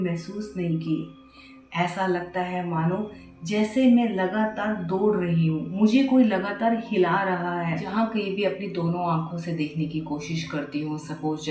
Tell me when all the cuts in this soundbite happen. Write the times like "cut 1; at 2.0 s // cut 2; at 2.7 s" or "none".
cut 1; at 7.9 s